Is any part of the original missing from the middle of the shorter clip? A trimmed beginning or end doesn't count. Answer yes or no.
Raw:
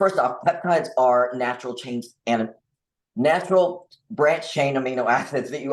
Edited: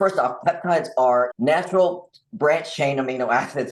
yes